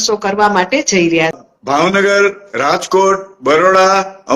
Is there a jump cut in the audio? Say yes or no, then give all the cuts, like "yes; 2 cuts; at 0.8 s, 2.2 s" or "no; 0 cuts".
yes; 1 cut; at 1.4 s